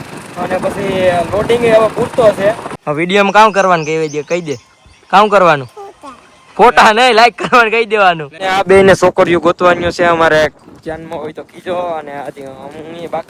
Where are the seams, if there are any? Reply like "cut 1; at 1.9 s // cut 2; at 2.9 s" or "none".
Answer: cut 1; at 2.7 s // cut 2; at 8.4 s